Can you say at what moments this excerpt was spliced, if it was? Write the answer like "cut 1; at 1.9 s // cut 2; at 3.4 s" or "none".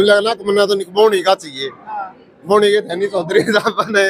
none